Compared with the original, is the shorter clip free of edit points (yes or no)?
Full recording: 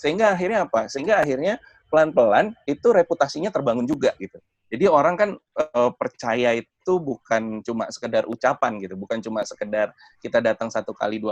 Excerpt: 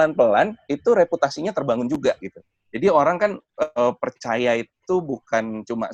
yes